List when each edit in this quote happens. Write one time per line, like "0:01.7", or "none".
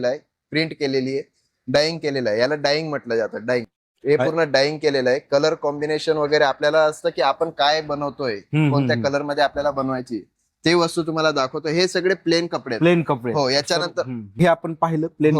0:14.4